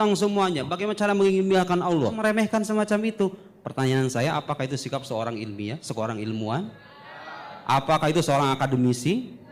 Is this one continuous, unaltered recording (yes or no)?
no